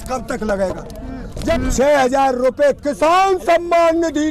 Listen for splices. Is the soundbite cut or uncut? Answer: cut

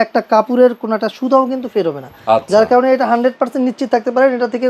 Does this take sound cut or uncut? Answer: uncut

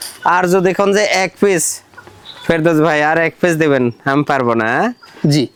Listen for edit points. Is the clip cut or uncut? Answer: uncut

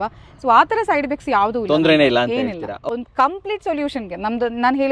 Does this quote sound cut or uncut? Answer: cut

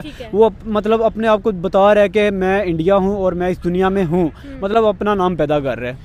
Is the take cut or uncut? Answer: uncut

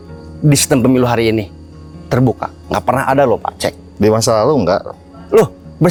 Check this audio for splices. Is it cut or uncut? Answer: uncut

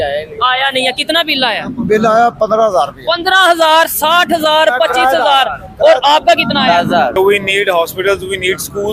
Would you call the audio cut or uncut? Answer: cut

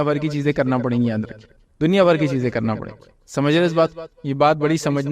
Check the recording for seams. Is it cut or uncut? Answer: uncut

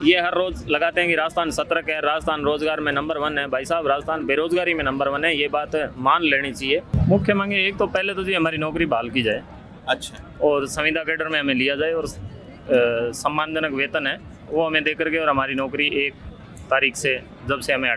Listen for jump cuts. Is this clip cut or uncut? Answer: cut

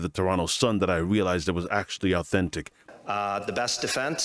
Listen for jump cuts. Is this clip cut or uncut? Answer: cut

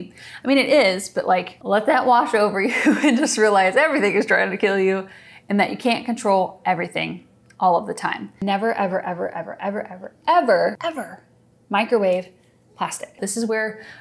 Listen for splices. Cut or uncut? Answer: cut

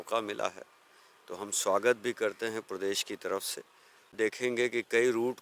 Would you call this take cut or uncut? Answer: cut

